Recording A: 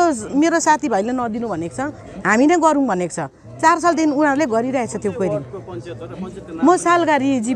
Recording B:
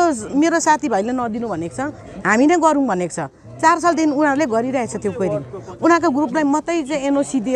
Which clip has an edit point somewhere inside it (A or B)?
B